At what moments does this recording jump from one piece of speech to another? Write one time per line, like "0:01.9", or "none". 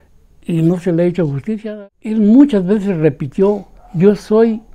0:01.7